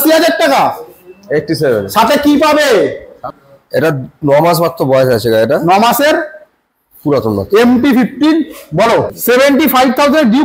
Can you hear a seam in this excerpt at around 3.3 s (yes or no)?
yes